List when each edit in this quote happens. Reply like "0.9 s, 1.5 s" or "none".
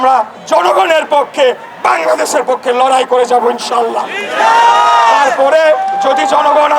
none